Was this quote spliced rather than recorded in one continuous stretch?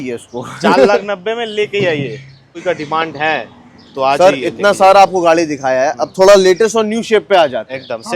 no; 0 cuts

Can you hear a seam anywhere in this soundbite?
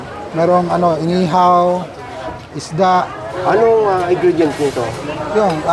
yes; 1 cut; at 3.4 s

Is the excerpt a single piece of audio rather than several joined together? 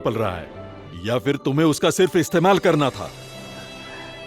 yes; 0 cuts

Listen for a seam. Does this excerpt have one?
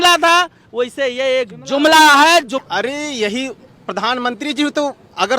yes; 1 cut; at 2.6 s

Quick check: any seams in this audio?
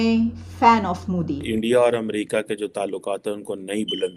yes; 1 cut; at 1.4 s

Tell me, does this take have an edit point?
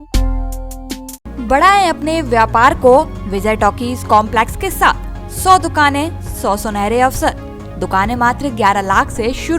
no; 0 cuts

